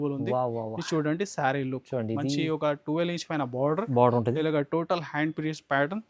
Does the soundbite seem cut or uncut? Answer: uncut